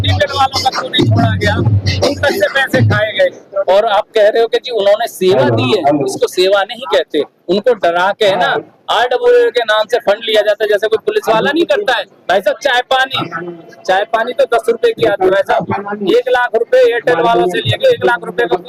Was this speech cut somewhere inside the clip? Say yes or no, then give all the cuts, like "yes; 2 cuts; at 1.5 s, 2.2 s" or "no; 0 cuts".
no; 0 cuts